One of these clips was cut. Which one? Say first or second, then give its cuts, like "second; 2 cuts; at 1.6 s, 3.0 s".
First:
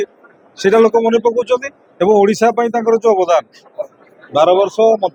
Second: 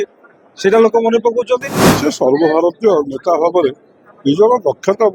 second; 1 cut; at 1.8 s